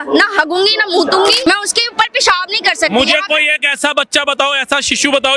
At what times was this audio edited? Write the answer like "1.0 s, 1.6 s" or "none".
1.4 s